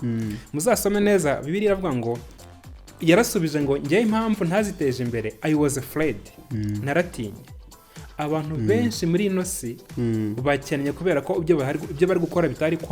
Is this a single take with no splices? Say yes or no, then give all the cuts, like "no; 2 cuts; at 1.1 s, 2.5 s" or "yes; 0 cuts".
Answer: yes; 0 cuts